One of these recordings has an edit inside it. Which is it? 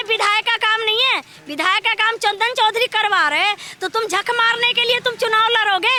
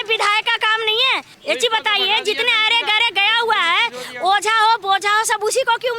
second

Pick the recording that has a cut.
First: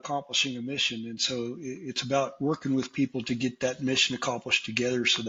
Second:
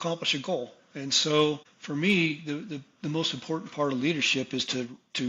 second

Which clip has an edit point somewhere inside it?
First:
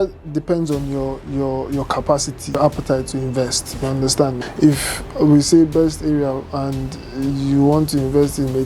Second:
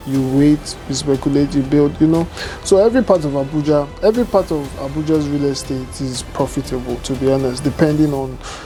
first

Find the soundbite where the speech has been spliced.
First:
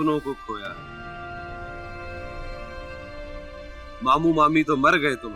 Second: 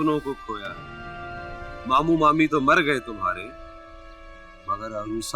second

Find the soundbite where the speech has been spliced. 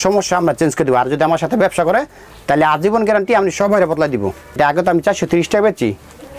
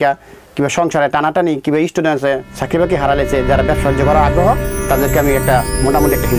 first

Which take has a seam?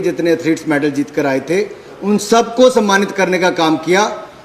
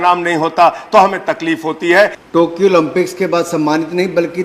second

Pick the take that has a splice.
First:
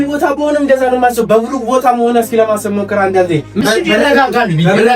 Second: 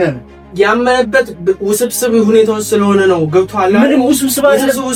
first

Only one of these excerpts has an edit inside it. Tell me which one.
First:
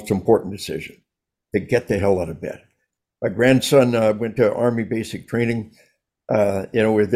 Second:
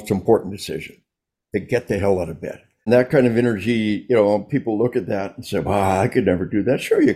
second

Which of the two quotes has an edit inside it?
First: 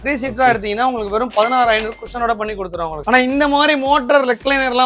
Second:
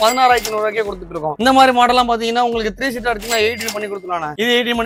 first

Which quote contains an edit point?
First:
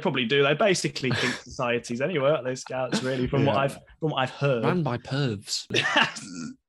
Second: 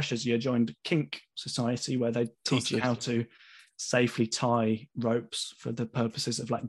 first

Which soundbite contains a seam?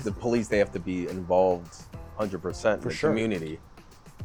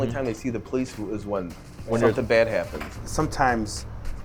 second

